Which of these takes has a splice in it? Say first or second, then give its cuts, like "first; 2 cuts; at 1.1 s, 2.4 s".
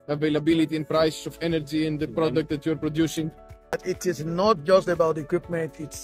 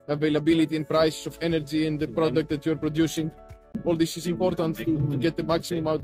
first; 1 cut; at 3.8 s